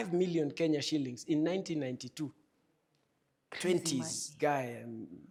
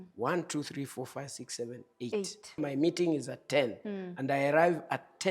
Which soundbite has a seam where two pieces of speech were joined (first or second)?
second